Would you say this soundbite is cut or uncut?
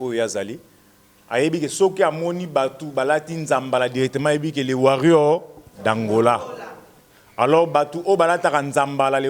uncut